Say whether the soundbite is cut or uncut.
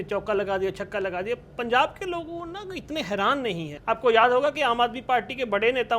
cut